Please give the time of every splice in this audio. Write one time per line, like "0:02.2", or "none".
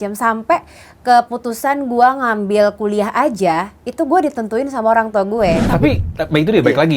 0:05.6